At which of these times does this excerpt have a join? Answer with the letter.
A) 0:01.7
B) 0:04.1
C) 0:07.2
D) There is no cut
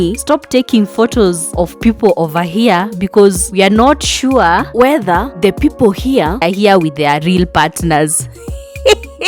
D